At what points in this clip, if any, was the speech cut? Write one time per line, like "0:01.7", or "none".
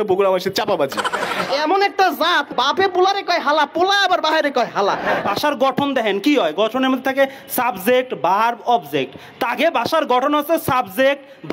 0:01.5
0:05.2

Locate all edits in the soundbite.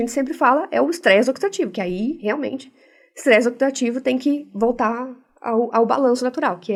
none

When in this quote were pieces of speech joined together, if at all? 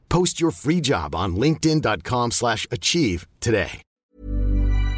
0:04.0

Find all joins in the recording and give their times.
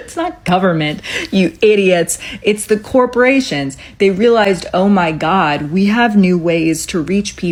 none

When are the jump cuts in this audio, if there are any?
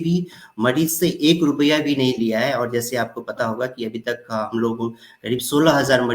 none

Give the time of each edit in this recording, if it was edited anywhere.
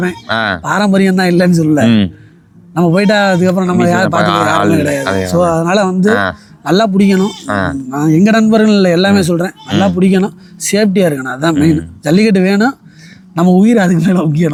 none

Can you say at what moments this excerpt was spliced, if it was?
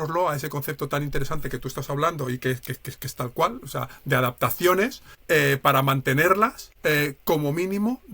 0:05.1
0:06.7

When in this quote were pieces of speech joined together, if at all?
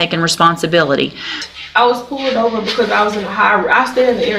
0:01.4

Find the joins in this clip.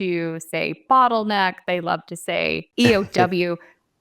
0:02.6

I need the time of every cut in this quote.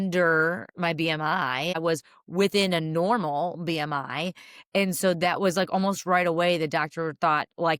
0:01.8

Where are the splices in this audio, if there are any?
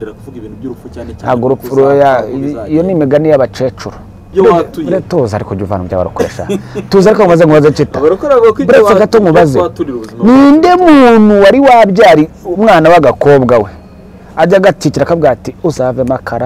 0:04.3

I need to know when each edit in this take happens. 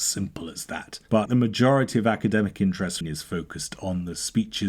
0:01.2
0:03.0

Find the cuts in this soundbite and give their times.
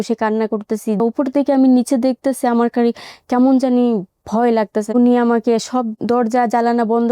0:01.0
0:04.9
0:06.0

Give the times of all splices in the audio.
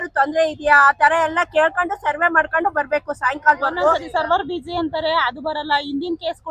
0:04.0

